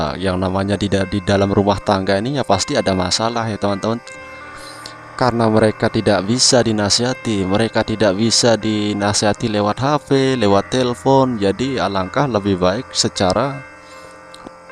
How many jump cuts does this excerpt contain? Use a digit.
0